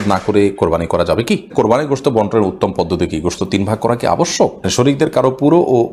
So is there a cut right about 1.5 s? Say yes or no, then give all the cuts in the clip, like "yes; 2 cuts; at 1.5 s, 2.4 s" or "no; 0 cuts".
yes; 2 cuts; at 1.5 s, 4.7 s